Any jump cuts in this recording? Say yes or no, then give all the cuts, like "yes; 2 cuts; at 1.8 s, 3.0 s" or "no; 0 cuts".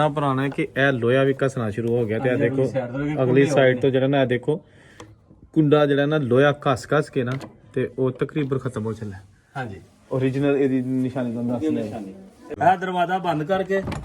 yes; 1 cut; at 12.5 s